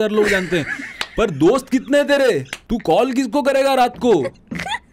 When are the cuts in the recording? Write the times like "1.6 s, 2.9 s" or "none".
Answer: 2.5 s